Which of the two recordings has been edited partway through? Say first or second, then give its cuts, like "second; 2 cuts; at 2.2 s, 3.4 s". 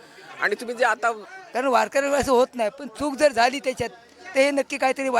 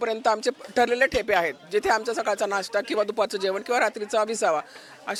first; 1 cut; at 1.3 s